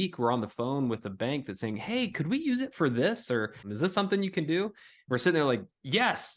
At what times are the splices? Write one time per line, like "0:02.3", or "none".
0:03.6